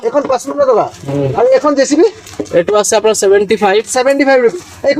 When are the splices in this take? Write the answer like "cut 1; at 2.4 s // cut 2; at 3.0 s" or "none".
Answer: none